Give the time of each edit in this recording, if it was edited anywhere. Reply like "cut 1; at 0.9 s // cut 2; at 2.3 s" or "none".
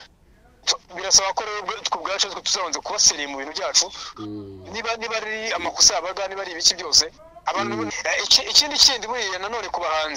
cut 1; at 7.9 s